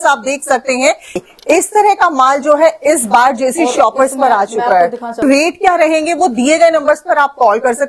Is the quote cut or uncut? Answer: cut